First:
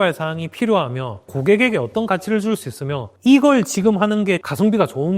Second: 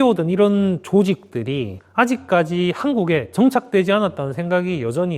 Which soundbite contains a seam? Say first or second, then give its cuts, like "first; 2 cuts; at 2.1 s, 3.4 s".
first; 3 cuts; at 1.3 s, 3.1 s, 4.4 s